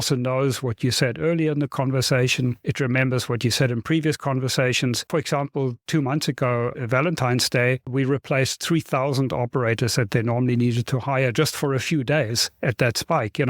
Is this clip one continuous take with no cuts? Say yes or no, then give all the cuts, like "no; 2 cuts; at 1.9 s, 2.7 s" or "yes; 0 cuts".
no; 2 cuts; at 5.0 s, 7.8 s